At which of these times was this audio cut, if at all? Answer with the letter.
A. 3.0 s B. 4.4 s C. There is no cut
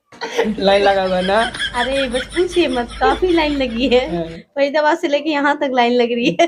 C